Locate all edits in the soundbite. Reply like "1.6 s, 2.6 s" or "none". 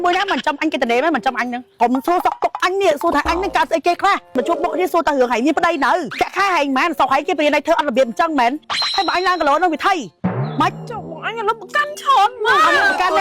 1.8 s, 4.3 s, 6.1 s